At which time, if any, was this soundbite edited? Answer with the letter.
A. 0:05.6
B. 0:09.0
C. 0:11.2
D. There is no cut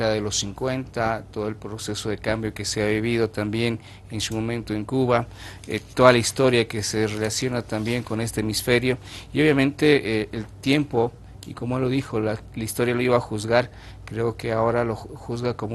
A